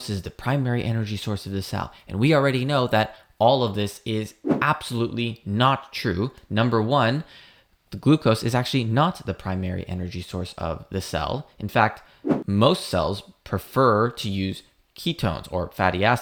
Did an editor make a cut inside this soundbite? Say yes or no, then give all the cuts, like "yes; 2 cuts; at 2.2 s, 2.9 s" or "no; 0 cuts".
no; 0 cuts